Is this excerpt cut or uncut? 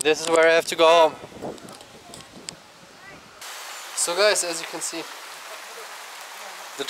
cut